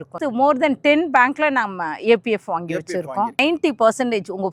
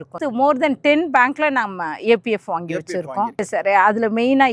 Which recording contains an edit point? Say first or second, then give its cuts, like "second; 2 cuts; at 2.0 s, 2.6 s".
first; 1 cut; at 3.4 s